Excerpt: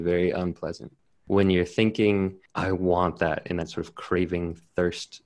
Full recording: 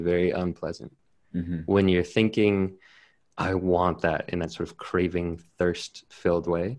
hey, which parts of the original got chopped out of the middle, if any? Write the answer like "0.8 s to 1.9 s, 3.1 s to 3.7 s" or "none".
1.2 s to 1.5 s, 2.8 s to 3.3 s